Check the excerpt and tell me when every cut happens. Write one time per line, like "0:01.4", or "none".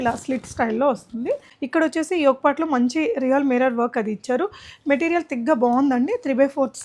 0:01.5